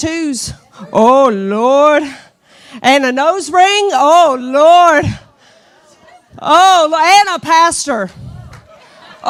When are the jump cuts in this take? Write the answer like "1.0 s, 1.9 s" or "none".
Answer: none